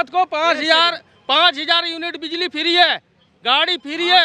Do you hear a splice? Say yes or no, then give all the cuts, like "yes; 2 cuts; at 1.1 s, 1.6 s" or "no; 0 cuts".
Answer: no; 0 cuts